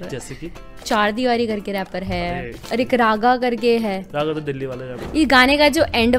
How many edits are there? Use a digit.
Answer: 3